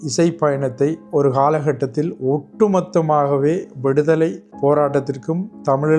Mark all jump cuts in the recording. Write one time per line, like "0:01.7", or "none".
0:01.0
0:04.4